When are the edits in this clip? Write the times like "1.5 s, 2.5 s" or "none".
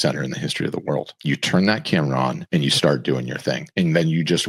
1.1 s, 2.4 s, 3.6 s